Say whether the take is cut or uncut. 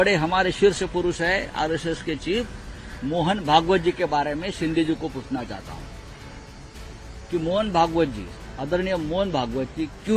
uncut